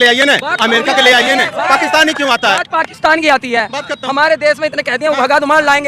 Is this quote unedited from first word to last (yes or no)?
yes